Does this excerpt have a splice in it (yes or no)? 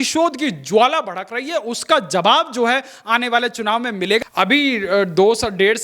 yes